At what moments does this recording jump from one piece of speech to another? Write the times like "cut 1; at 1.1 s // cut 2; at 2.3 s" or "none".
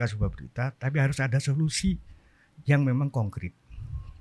none